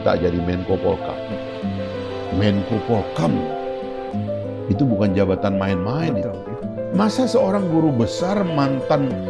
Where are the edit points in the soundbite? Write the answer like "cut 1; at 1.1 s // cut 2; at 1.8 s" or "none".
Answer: cut 1; at 6.4 s